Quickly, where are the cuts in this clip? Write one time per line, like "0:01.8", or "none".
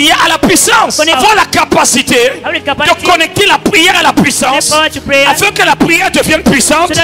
none